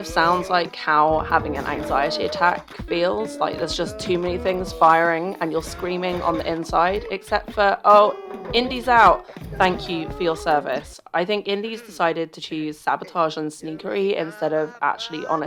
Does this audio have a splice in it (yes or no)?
no